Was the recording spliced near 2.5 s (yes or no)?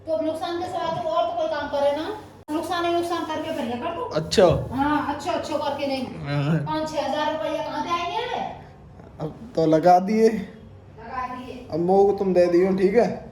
yes